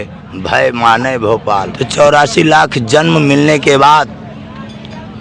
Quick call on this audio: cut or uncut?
cut